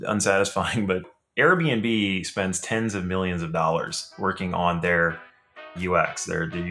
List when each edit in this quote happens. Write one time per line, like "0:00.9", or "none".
0:01.0
0:05.8